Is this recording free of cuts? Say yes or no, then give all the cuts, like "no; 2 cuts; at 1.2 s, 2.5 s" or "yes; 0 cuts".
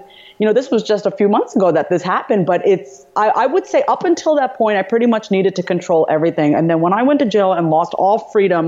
yes; 0 cuts